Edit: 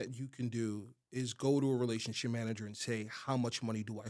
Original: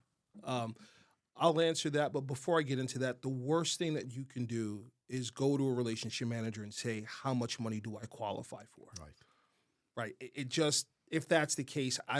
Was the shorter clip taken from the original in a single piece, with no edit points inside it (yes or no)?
yes